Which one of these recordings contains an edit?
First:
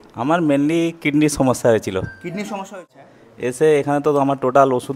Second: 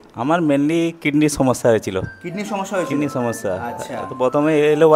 first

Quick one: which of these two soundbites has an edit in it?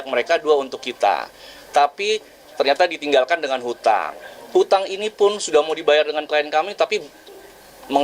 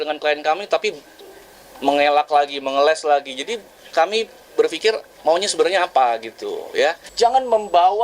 second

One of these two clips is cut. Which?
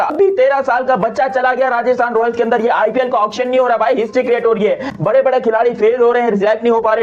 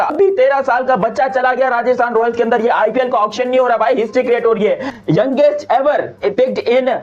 second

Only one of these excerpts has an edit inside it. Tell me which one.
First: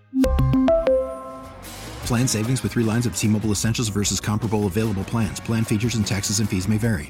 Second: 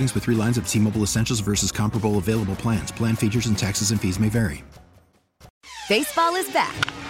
second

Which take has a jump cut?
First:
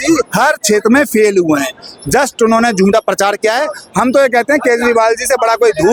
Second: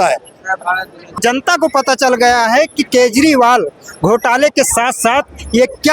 second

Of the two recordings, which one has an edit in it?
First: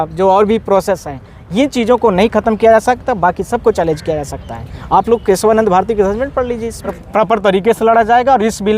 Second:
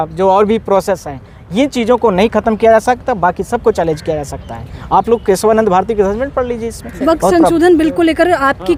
first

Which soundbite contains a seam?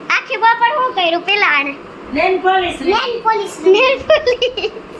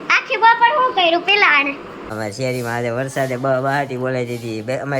second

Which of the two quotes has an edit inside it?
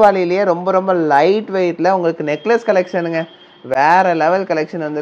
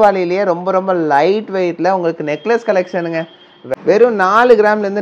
second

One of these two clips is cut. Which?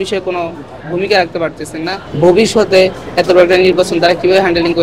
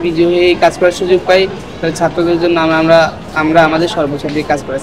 first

